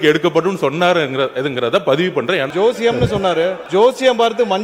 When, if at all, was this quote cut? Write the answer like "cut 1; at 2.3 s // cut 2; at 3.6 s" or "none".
cut 1; at 2.5 s // cut 2; at 3.6 s